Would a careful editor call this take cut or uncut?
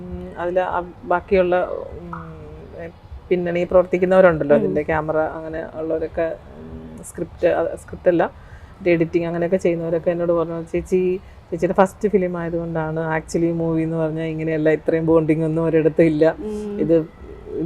uncut